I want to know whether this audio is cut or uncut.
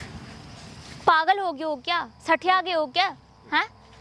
uncut